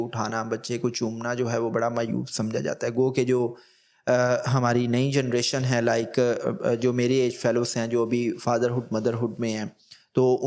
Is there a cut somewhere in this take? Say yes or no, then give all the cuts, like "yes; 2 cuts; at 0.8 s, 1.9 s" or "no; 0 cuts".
no; 0 cuts